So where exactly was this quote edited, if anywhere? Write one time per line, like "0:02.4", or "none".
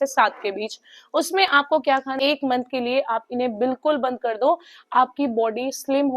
0:02.1